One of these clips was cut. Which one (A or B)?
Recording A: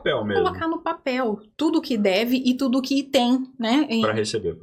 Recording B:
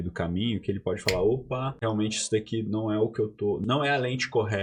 B